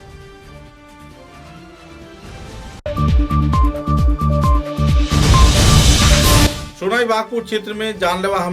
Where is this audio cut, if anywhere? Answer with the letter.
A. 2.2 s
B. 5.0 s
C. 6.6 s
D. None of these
D